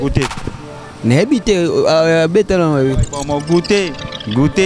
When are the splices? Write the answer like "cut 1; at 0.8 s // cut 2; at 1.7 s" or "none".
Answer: none